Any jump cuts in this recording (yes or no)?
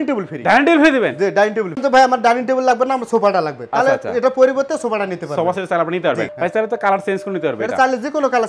yes